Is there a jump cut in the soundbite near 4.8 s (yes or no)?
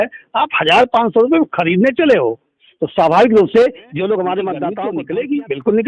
yes